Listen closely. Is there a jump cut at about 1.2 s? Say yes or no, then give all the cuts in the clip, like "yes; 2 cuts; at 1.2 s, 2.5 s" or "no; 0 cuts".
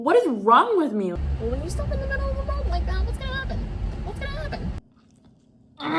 yes; 2 cuts; at 1.2 s, 4.8 s